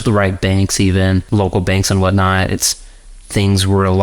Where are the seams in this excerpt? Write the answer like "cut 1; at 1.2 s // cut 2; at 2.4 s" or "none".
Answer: cut 1; at 1.3 s